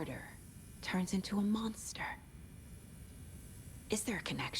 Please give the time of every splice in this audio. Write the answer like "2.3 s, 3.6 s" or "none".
2.2 s, 3.9 s